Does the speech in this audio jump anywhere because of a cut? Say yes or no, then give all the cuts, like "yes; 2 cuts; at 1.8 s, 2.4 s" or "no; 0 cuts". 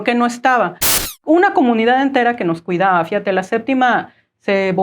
yes; 1 cut; at 1.0 s